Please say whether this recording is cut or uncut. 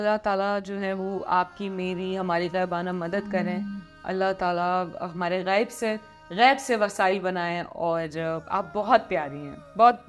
uncut